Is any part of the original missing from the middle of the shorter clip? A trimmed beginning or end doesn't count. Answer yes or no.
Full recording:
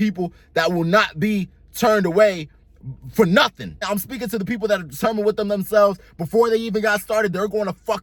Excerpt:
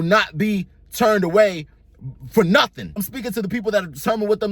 yes